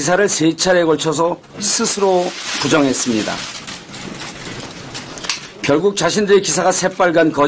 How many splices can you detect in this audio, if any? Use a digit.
1